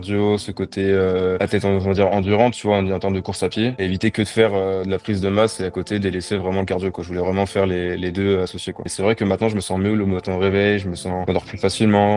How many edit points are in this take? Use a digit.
1